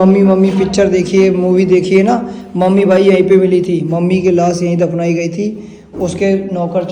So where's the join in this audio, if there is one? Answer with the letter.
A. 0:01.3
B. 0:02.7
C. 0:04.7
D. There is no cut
D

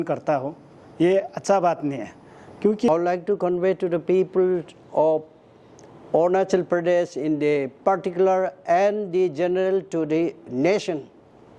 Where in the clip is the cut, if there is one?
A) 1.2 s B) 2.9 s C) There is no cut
B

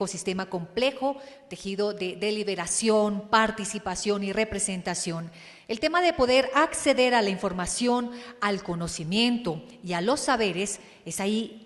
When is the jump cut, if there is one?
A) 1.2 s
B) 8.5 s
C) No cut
C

